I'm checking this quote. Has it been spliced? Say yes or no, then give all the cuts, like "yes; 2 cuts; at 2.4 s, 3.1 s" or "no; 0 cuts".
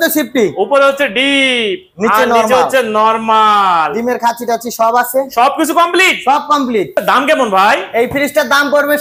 no; 0 cuts